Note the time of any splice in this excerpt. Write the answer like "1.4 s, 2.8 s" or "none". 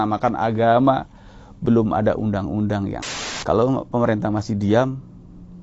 3.1 s